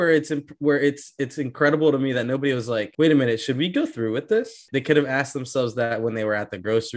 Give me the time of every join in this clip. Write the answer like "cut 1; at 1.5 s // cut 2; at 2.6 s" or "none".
cut 1; at 2.9 s // cut 2; at 4.7 s